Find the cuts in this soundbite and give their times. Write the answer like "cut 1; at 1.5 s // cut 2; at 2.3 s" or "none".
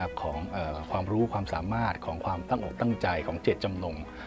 none